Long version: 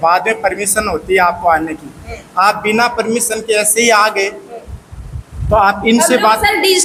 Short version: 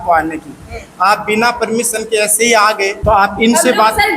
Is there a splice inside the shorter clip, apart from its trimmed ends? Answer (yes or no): yes